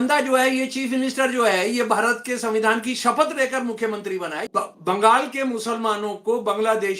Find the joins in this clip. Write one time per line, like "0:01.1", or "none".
0:04.4

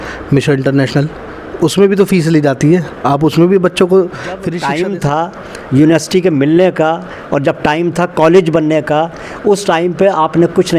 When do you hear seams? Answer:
0:04.5

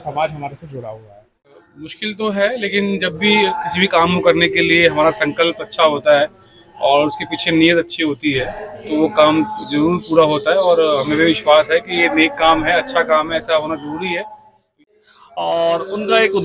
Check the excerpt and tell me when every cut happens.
0:01.5
0:14.6

